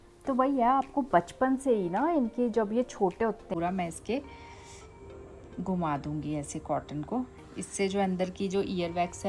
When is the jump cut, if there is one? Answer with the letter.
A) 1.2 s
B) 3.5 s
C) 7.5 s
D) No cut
B